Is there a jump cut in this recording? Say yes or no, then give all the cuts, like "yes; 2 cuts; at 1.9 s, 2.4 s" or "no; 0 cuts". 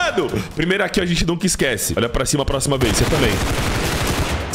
yes; 1 cut; at 1.9 s